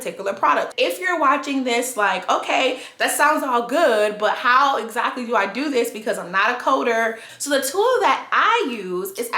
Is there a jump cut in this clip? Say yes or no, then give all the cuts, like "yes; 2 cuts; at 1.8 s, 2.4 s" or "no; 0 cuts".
yes; 1 cut; at 7.2 s